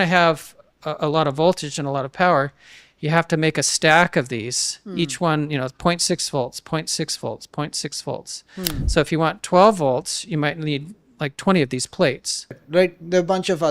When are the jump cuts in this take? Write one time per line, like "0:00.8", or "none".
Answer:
0:12.6

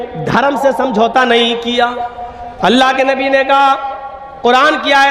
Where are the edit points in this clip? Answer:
0:02.6

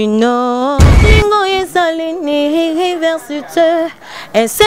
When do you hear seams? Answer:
0:01.0

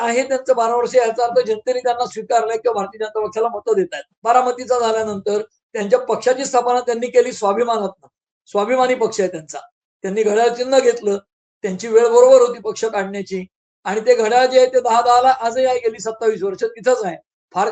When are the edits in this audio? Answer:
0:04.1

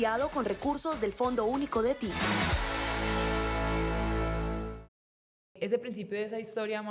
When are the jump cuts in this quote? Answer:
0:05.5

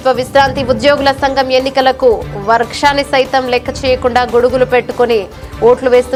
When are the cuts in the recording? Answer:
none

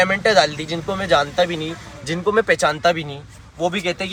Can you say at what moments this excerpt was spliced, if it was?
none

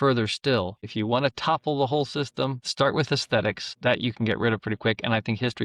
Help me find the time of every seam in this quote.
0:00.9
0:02.6
0:03.7

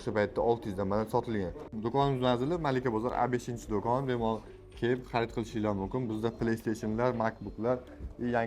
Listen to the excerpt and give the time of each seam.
0:01.6

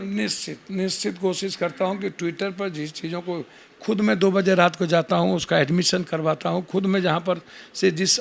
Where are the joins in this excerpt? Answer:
none

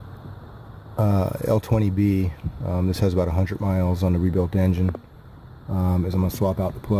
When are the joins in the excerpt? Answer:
none

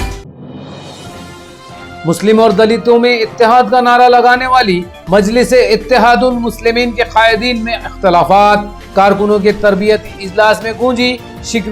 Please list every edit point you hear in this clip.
0:00.9

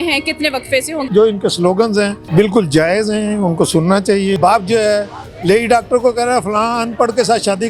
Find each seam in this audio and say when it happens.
0:01.1
0:04.4

